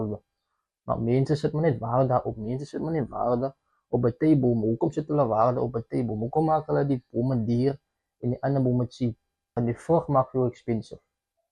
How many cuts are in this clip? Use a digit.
1